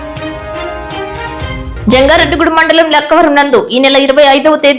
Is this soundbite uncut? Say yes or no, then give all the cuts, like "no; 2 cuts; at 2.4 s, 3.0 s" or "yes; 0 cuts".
no; 1 cut; at 1.7 s